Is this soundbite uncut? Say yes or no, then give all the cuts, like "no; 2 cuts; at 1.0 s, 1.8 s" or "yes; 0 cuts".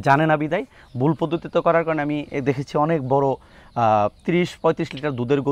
yes; 0 cuts